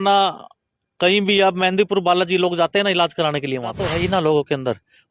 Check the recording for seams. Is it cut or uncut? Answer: cut